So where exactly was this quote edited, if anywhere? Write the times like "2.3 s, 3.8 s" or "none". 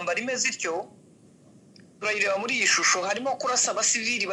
none